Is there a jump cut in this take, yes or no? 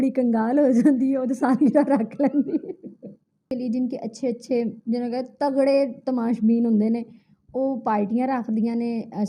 yes